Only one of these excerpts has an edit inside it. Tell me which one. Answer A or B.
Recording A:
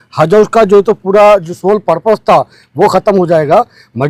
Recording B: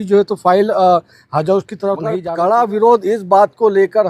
B